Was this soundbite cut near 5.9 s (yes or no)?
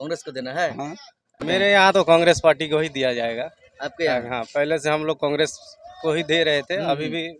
no